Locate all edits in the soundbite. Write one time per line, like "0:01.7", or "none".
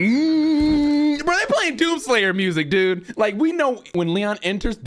0:03.1
0:03.9